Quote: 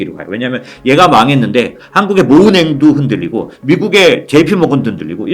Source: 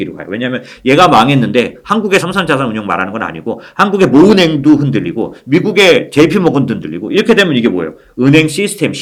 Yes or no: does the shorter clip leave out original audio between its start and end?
yes